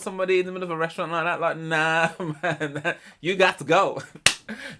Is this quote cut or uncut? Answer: uncut